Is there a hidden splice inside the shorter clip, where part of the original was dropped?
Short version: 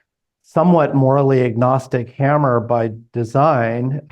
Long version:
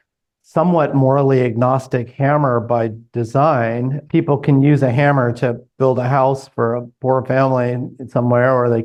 no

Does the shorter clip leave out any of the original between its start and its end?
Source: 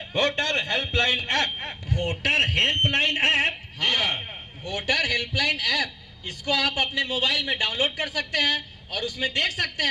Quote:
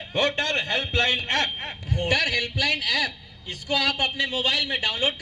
yes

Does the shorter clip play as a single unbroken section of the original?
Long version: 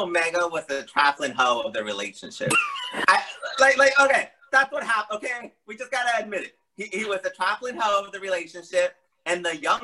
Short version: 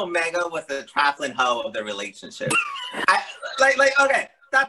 yes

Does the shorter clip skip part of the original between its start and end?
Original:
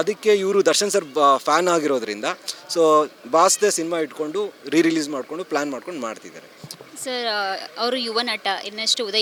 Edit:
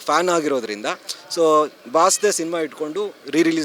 no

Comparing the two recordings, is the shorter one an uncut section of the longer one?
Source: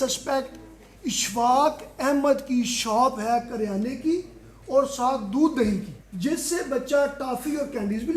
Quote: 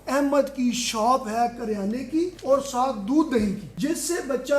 no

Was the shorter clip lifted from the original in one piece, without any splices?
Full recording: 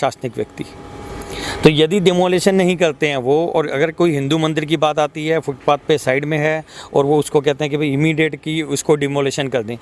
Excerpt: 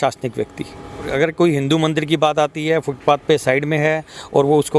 no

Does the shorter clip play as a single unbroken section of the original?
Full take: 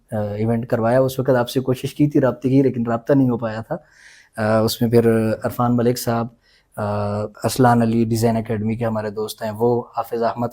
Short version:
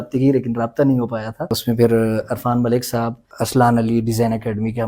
no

